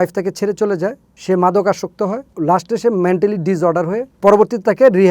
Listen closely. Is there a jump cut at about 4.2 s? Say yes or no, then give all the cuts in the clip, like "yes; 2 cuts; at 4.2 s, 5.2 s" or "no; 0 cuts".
no; 2 cuts; at 1.1 s, 2.3 s